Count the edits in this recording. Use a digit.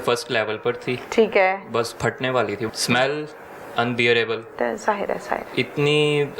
2